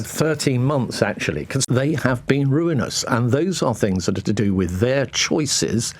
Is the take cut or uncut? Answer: cut